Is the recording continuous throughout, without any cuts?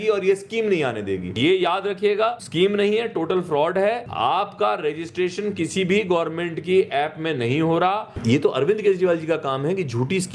no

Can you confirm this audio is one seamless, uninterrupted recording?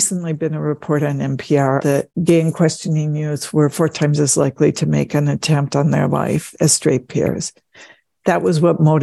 no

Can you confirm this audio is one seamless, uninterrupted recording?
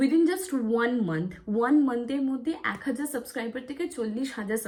yes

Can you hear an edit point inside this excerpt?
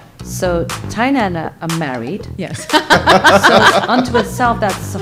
no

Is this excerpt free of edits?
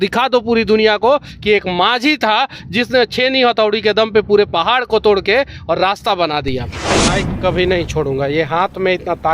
no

